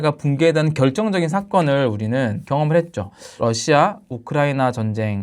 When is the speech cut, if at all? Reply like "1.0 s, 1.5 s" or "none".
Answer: 2.4 s, 3.2 s